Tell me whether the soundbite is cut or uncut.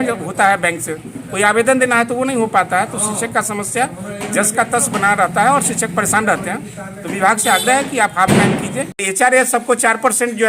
cut